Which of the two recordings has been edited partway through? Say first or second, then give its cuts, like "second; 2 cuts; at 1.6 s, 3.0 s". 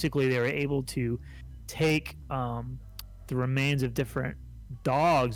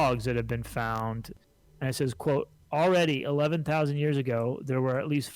second; 1 cut; at 1.3 s